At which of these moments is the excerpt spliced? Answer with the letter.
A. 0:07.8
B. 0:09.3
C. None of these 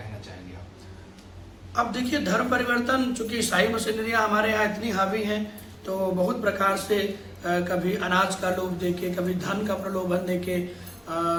C